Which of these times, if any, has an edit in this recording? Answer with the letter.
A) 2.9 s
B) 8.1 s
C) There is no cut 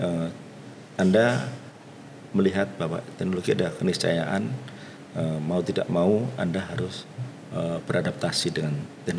C